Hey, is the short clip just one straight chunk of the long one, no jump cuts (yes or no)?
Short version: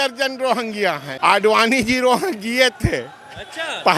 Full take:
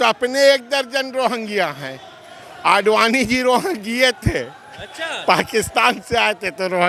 no